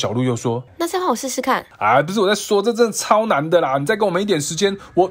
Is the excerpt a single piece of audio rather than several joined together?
yes; 0 cuts

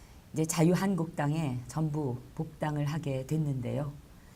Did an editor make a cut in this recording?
no; 0 cuts

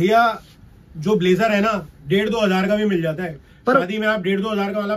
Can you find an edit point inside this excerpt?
no; 0 cuts

